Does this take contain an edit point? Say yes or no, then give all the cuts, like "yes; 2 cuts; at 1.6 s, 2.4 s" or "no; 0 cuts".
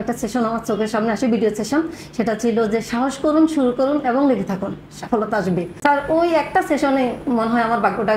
no; 0 cuts